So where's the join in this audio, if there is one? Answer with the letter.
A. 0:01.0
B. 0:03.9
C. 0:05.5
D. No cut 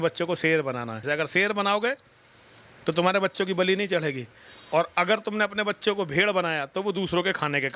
A